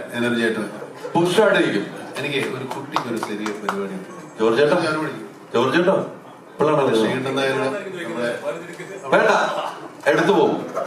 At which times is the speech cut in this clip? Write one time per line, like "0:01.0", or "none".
none